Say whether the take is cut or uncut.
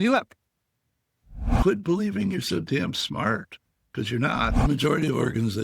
cut